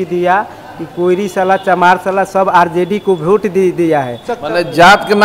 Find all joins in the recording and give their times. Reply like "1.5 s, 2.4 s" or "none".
4.3 s